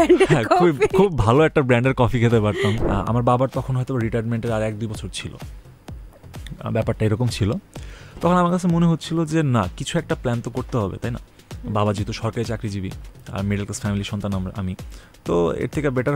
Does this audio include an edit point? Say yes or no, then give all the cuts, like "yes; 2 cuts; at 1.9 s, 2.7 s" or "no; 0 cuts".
yes; 1 cut; at 2.8 s